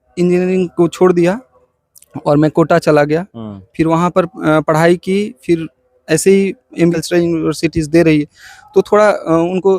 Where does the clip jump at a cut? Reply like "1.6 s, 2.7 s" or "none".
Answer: 7.0 s

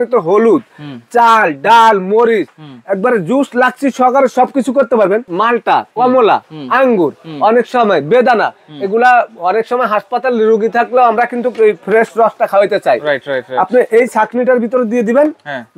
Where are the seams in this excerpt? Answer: 5.3 s

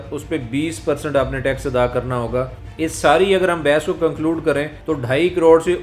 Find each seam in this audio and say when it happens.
2.6 s, 4.7 s

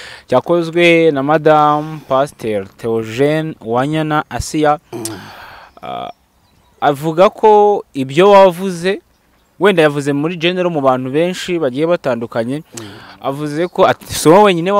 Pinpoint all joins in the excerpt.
none

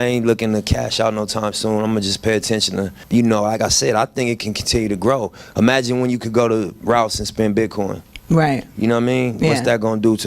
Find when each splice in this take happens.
3.0 s

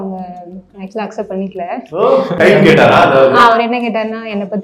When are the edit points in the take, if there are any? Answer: 2.3 s, 3.5 s

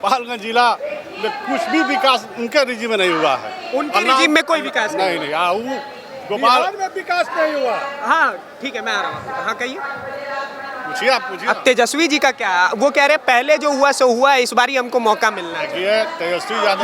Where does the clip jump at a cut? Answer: none

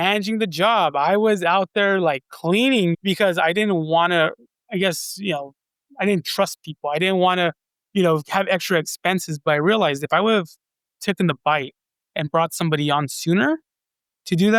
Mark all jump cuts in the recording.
none

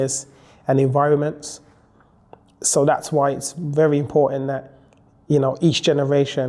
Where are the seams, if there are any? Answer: none

